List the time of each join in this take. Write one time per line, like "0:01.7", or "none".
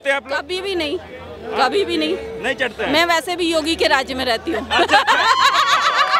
none